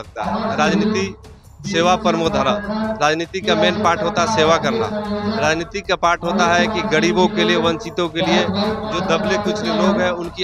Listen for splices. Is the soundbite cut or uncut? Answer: uncut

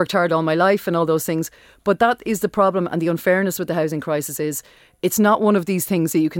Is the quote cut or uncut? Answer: uncut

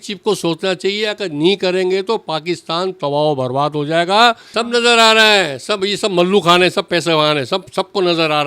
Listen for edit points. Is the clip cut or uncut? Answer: cut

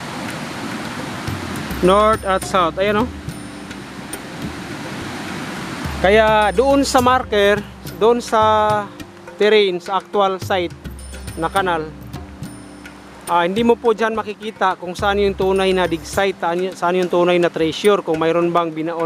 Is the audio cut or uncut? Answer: uncut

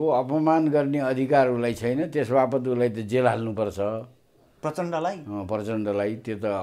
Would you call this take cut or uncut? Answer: uncut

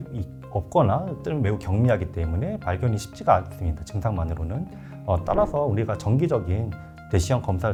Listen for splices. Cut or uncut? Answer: uncut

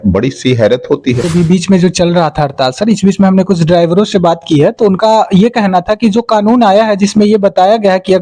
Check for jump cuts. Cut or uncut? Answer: cut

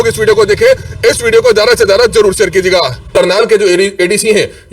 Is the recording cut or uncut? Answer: cut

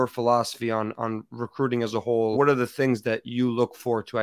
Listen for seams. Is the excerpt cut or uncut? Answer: cut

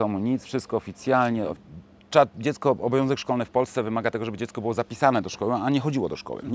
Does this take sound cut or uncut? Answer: cut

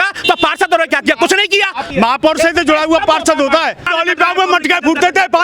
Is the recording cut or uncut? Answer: cut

